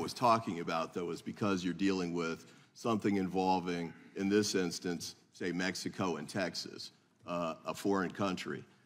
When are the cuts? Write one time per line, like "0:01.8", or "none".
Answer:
0:02.5
0:07.5